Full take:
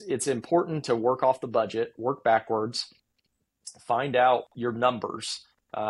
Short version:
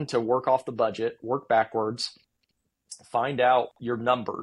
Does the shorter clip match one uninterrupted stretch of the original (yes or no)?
yes